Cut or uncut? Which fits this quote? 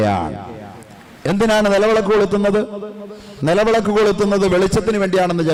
uncut